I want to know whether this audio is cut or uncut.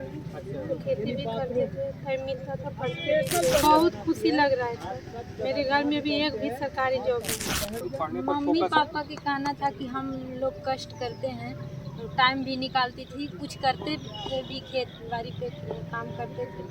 cut